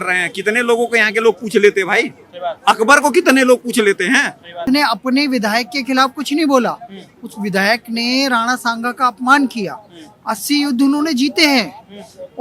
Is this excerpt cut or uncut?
cut